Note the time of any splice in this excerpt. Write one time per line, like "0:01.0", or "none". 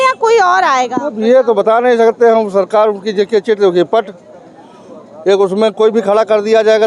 none